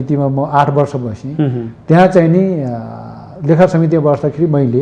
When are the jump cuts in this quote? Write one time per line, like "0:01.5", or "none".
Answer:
none